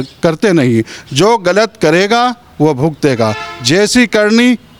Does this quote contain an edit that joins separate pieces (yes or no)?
no